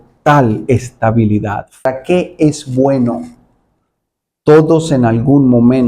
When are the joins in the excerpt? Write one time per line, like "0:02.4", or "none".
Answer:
0:01.8

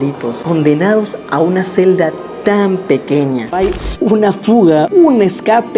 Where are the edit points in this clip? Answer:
0:03.5
0:04.9

